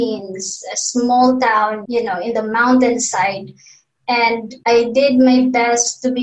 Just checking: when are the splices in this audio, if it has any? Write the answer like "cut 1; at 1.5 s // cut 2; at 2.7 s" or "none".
cut 1; at 1.8 s // cut 2; at 4.5 s